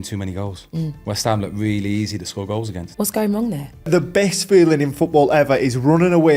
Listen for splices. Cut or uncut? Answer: cut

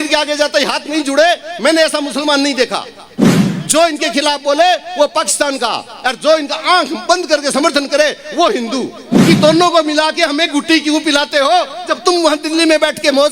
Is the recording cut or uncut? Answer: cut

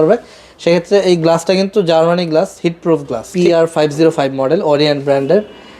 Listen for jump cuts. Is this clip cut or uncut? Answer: cut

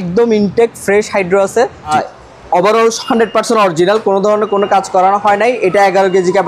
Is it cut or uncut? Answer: cut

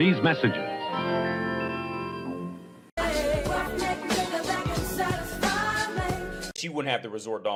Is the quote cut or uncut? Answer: uncut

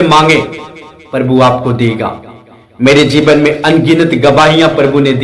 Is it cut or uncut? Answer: uncut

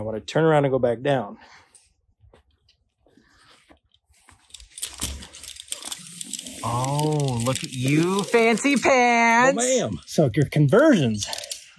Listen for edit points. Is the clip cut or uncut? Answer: uncut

